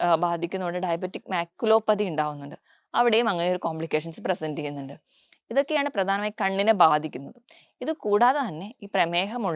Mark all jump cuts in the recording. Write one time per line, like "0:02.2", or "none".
none